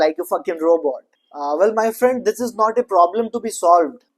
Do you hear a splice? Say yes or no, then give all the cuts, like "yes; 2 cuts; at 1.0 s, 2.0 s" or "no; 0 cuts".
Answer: no; 0 cuts